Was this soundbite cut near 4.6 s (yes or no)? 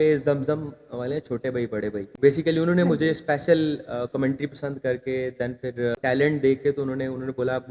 no